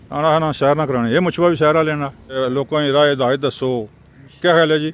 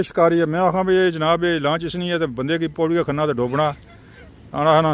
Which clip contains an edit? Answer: first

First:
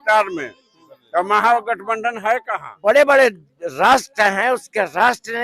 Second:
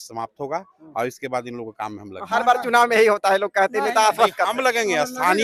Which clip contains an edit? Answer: first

